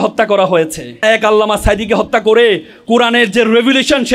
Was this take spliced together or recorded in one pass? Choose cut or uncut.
cut